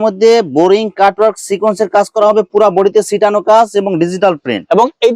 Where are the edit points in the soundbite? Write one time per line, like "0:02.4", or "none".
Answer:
none